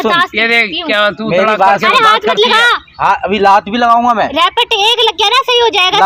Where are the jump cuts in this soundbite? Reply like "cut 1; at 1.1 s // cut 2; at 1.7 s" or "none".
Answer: none